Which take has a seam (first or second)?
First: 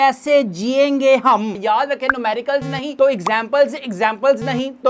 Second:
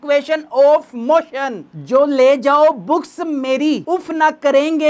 first